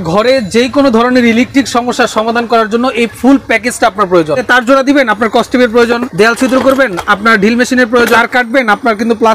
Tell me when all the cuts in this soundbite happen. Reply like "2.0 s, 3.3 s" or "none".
4.4 s, 6.1 s, 8.2 s